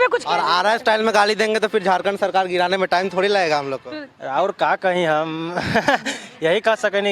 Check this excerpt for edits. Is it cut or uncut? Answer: cut